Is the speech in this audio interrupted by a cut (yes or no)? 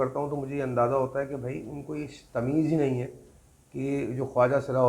no